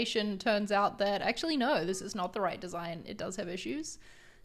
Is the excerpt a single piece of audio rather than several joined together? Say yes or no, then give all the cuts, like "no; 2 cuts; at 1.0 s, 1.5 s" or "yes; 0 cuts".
yes; 0 cuts